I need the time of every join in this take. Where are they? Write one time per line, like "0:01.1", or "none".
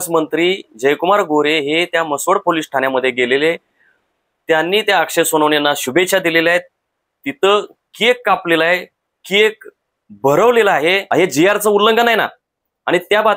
0:11.0